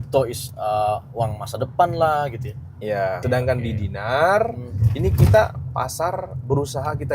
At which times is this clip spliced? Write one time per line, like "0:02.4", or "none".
0:03.2